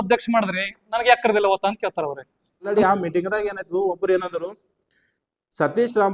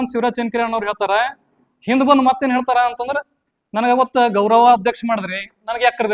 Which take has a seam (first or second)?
first